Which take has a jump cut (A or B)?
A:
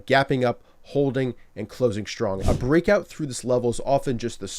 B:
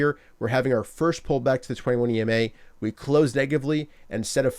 A